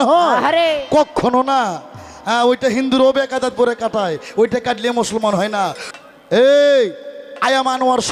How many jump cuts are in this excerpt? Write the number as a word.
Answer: one